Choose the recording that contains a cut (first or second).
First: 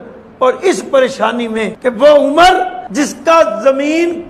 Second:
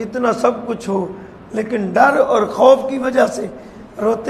first